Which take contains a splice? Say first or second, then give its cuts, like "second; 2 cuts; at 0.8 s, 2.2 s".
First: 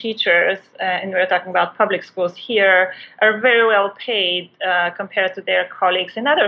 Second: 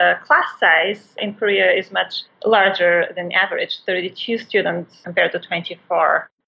second; 2 cuts; at 1.2 s, 5.0 s